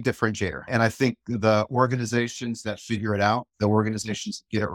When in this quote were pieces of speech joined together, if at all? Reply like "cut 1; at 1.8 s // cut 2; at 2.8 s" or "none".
none